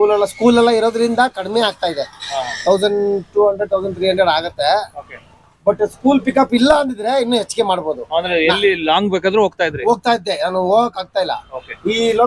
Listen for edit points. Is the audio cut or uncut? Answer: uncut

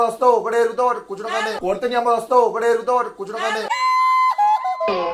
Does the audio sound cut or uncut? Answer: uncut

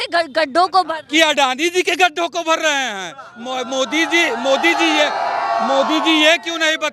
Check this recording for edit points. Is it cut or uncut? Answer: uncut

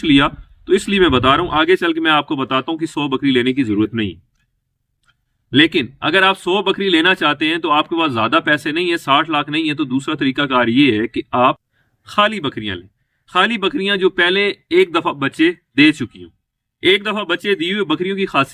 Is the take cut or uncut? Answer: uncut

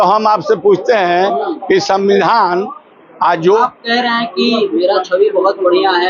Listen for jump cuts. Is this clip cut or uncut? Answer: cut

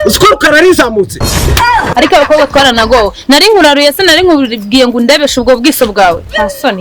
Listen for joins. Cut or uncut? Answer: uncut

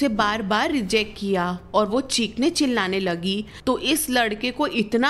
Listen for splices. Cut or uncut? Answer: cut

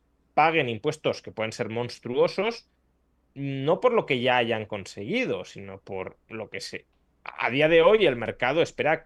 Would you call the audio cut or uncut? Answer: uncut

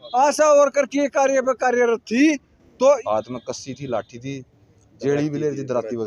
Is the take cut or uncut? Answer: cut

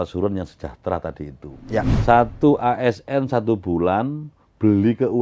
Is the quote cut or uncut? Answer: cut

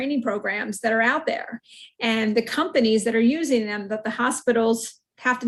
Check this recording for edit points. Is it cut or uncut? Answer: uncut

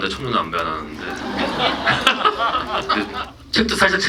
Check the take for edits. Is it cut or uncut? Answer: cut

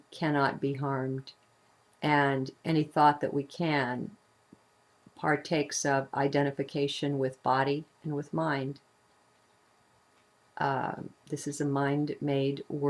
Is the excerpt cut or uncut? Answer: cut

